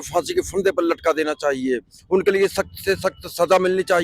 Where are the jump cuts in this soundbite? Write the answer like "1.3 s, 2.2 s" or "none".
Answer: none